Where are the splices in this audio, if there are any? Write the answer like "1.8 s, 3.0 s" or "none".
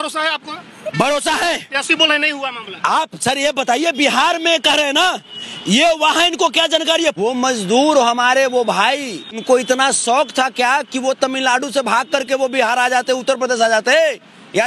7.2 s, 9.4 s